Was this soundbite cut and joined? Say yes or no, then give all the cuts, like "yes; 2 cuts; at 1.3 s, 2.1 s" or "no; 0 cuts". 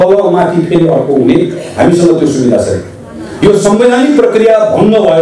no; 0 cuts